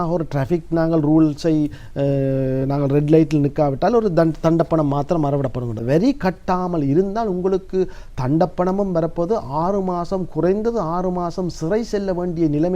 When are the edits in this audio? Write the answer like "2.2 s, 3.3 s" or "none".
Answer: 5.8 s